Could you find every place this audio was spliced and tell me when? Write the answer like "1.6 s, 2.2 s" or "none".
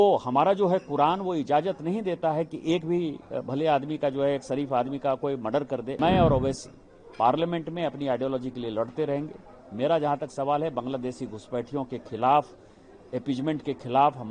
6.0 s